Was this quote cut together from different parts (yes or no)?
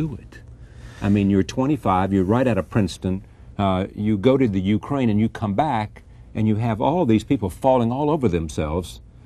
yes